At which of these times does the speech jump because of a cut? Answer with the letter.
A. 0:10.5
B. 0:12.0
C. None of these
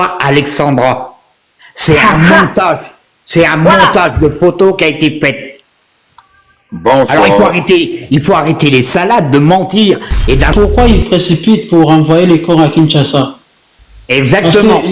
A